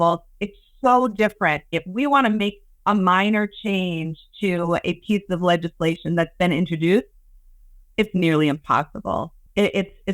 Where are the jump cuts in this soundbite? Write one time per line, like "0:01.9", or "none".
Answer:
0:01.8